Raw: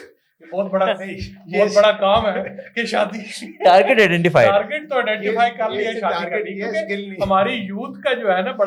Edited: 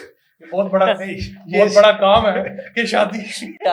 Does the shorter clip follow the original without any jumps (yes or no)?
yes